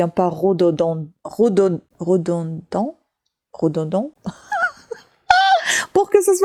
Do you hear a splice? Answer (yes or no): no